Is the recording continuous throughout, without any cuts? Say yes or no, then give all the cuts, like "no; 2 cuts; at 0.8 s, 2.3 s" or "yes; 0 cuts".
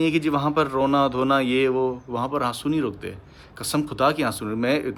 yes; 0 cuts